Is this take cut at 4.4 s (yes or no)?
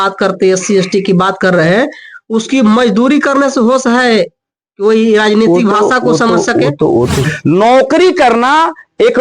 no